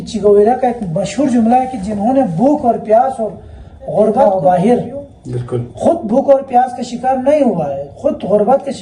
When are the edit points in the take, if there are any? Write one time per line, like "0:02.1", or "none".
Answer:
0:04.3